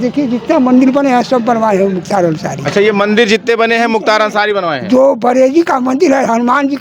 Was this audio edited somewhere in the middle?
no; 0 cuts

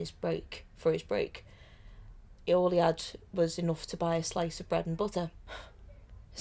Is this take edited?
yes; 1 cut; at 5.5 s

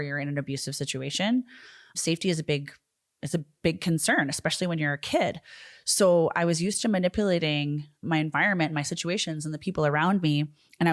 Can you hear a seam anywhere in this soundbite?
no; 0 cuts

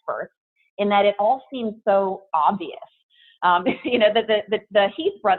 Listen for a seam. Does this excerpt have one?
no; 0 cuts

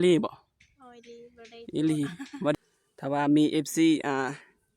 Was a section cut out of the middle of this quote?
yes; 1 cut; at 2.5 s

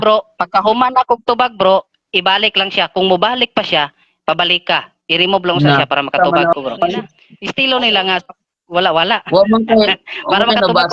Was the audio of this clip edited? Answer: no; 0 cuts

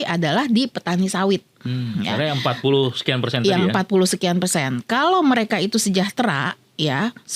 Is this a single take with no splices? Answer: yes; 0 cuts

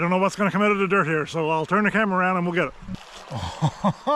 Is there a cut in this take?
yes; 1 cut; at 2.8 s

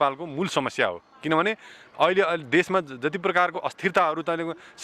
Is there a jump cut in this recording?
no; 0 cuts

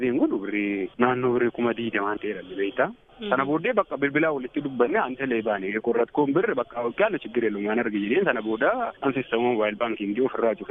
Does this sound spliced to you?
no; 0 cuts

